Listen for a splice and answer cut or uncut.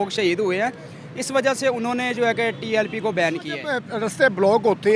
cut